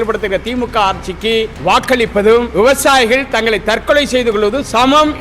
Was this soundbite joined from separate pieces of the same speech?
yes; 2 cuts; at 1.5 s, 2.5 s

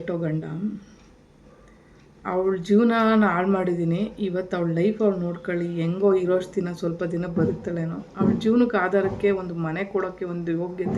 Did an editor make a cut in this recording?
no; 0 cuts

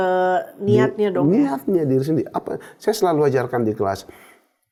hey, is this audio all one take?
yes; 0 cuts

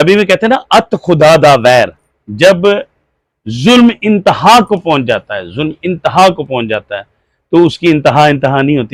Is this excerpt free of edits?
yes; 0 cuts

